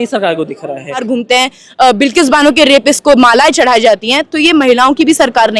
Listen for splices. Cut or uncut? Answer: cut